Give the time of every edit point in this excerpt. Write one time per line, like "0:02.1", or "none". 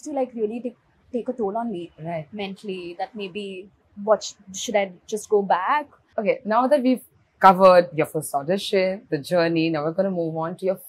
none